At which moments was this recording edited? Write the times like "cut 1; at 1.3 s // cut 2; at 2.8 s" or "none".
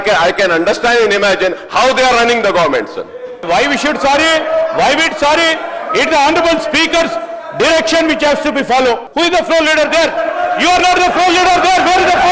cut 1; at 3.4 s // cut 2; at 9.1 s